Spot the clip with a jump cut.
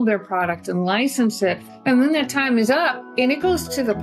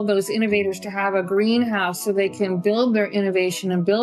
first; 2 cuts; at 1.6 s, 3.0 s

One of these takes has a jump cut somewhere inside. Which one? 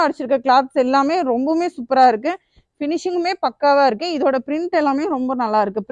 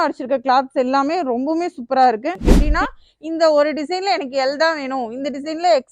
second; 1 cut; at 2.5 s

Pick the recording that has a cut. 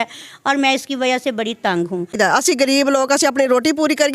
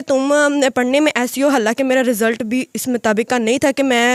first; 1 cut; at 2.2 s

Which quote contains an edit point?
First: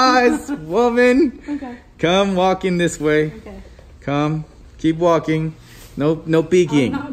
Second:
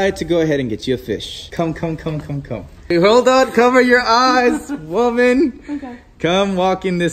second; 2 cuts; at 1.4 s, 2.9 s

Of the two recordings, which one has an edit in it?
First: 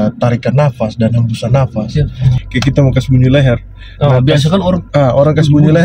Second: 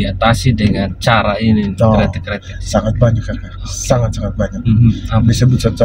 first; 1 cut; at 1.9 s

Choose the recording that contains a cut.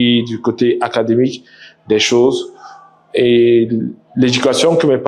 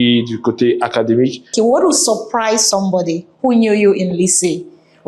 second; 1 cut; at 1.5 s

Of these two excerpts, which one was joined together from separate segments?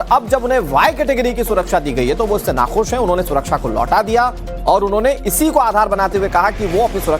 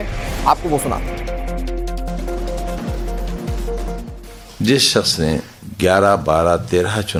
first; 1 cut; at 6.0 s

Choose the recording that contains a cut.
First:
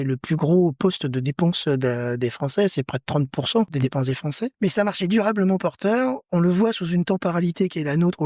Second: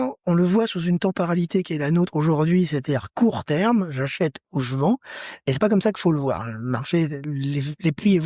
first; 1 cut; at 4.1 s

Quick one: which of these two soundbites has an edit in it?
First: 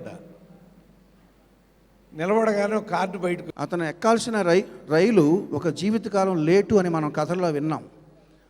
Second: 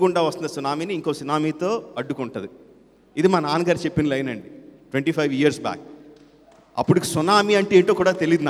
first; 1 cut; at 3.5 s

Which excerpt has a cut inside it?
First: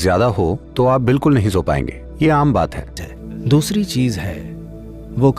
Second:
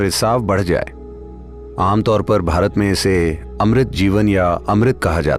first; 1 cut; at 3.0 s

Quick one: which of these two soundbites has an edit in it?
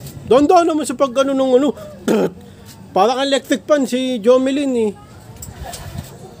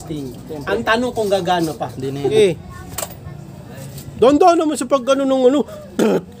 second; 1 cut; at 2.3 s

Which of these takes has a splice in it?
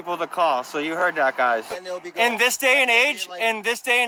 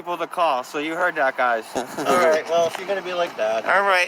second; 1 cut; at 1.8 s

